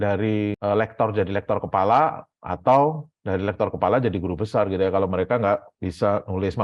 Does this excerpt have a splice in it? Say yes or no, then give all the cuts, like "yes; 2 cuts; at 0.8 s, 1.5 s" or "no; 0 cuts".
no; 0 cuts